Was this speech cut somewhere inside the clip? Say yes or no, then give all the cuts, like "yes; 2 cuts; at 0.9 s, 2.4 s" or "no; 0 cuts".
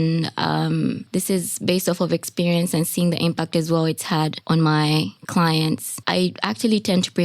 yes; 3 cuts; at 1.0 s, 4.4 s, 5.9 s